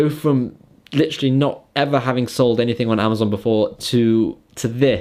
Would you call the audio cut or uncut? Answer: uncut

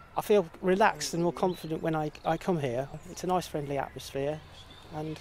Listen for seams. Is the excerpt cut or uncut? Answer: cut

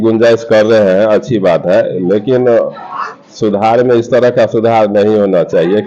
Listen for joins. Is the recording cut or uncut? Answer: uncut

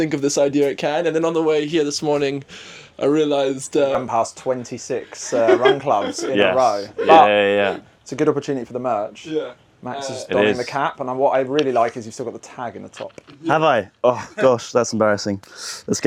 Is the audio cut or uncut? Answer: uncut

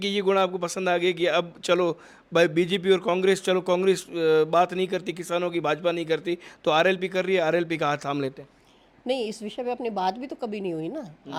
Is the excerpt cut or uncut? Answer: uncut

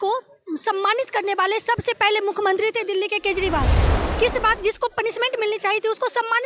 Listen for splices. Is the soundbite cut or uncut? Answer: uncut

